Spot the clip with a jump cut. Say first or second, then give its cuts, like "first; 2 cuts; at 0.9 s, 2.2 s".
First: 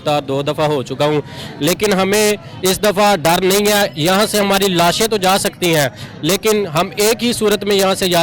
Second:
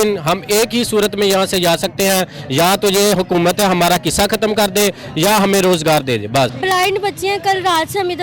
second; 1 cut; at 6.5 s